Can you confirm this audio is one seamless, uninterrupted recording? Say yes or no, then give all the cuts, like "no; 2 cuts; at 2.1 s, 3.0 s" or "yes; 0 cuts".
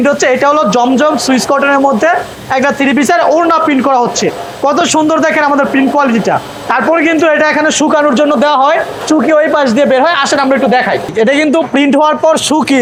yes; 0 cuts